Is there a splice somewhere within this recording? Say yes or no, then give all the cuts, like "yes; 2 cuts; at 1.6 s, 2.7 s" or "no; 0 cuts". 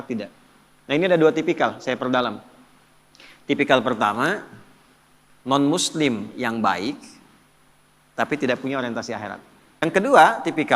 yes; 1 cut; at 9.8 s